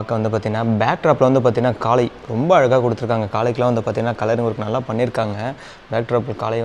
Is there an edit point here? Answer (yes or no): no